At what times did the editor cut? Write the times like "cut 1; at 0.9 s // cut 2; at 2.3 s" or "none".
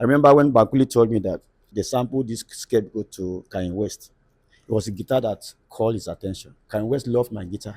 cut 1; at 1.6 s // cut 2; at 6.5 s

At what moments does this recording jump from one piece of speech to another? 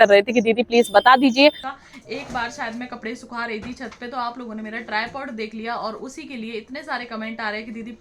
cut 1; at 1.7 s

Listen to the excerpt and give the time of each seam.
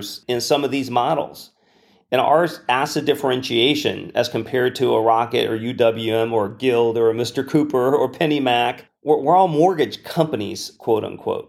cut 1; at 8.9 s

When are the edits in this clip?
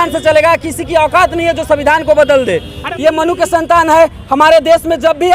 cut 1; at 2.8 s

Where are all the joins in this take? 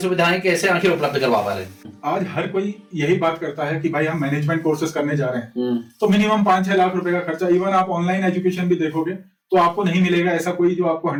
none

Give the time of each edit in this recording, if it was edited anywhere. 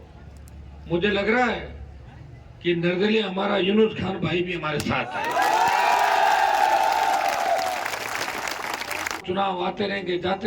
cut 1; at 9.2 s

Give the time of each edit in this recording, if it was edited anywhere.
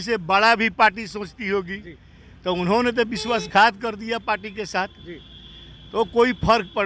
none

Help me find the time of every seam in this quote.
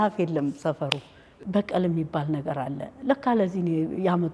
cut 1; at 1.3 s

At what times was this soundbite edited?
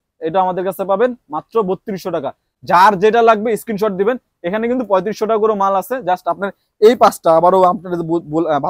none

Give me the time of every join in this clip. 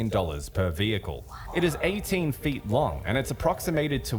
none

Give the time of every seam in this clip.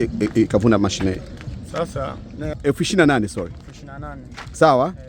cut 1; at 2.6 s

